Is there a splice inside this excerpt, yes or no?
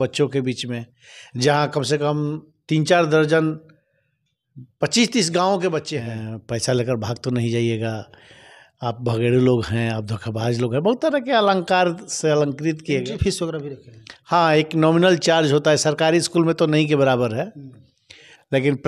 yes